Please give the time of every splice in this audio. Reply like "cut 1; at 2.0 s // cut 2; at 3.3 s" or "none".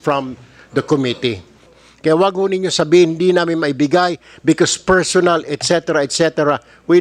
cut 1; at 1.7 s